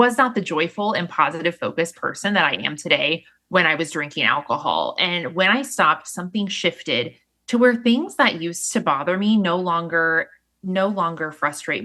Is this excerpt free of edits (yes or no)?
yes